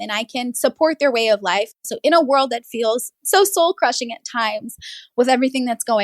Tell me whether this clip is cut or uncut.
cut